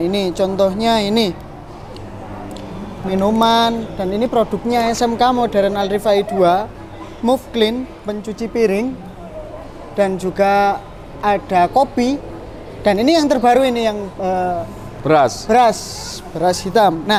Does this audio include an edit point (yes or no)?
no